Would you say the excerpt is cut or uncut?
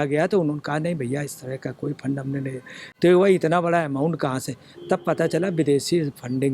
uncut